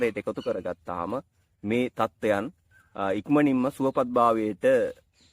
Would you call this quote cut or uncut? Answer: uncut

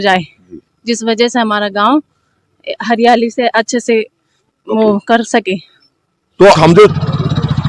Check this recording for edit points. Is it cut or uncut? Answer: cut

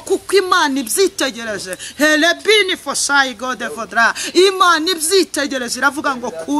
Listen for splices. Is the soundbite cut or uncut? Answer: uncut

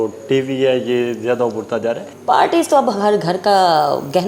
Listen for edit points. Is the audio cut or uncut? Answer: cut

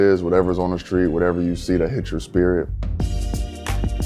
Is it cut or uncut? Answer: uncut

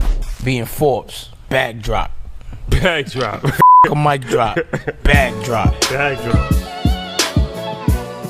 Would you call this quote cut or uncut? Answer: uncut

